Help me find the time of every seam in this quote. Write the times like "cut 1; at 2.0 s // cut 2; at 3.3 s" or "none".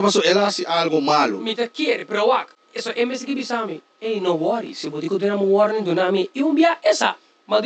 none